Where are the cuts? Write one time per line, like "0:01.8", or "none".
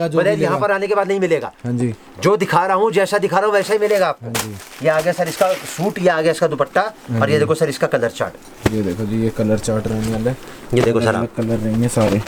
none